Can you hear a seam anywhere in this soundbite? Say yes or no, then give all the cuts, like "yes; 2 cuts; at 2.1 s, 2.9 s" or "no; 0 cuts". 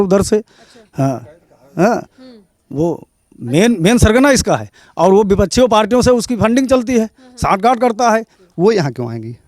yes; 1 cut; at 8.4 s